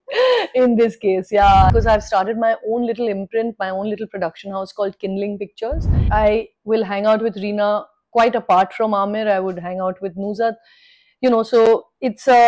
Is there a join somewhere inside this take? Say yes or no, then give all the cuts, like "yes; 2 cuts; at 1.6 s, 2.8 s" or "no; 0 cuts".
yes; 2 cuts; at 1.7 s, 6.0 s